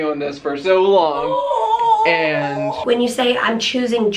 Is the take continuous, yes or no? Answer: no